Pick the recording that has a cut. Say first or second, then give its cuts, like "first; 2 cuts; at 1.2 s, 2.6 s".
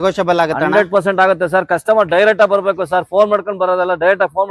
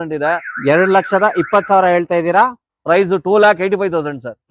second; 1 cut; at 2.6 s